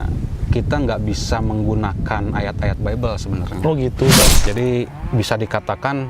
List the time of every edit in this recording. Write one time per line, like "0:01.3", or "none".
0:04.4